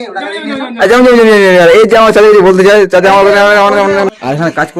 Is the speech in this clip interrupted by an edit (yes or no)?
no